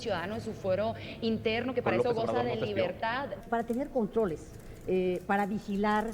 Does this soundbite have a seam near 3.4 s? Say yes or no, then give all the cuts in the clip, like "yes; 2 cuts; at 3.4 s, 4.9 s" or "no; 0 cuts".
yes; 1 cut; at 3.4 s